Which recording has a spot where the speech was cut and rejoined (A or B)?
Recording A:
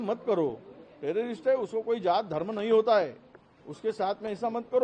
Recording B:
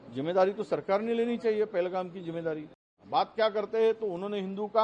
B